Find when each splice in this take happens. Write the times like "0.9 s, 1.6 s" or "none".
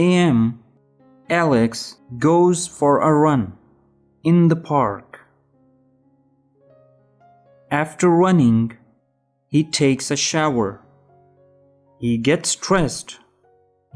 5.9 s, 7.7 s